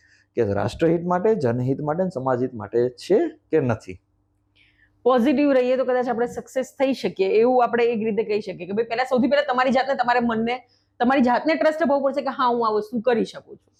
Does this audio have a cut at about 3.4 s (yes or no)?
no